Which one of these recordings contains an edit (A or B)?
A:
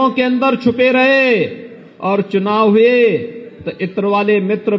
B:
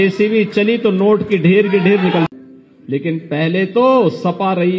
B